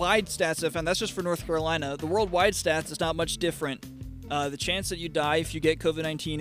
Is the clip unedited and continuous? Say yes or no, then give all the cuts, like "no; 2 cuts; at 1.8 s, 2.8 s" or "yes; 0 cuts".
yes; 0 cuts